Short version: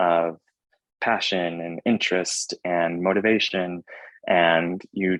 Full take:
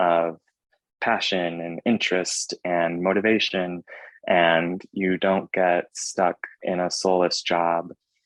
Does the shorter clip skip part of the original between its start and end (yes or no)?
no